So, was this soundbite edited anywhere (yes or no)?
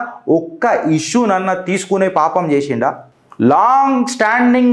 no